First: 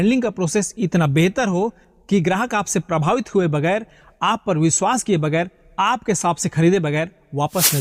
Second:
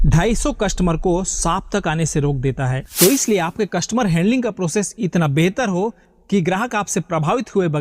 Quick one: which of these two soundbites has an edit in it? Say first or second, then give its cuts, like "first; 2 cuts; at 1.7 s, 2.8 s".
second; 1 cut; at 2.8 s